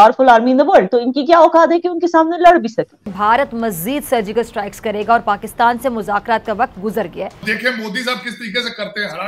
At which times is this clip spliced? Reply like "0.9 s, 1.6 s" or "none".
3.1 s, 7.4 s